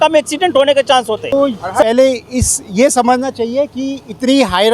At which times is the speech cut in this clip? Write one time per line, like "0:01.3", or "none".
0:01.3